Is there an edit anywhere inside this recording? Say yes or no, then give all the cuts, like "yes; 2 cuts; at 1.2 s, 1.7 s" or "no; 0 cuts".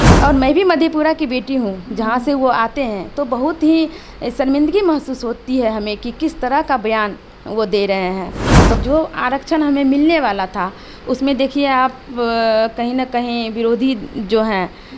yes; 1 cut; at 8.8 s